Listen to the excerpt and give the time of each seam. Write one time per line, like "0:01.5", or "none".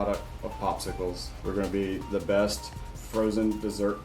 0:01.3